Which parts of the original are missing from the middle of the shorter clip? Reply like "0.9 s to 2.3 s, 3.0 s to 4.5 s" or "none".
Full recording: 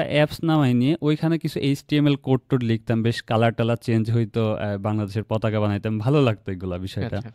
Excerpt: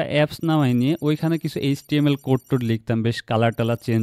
none